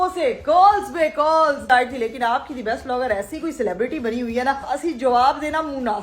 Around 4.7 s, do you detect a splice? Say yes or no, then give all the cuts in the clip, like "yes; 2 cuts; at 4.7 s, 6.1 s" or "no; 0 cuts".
yes; 2 cuts; at 1.7 s, 4.7 s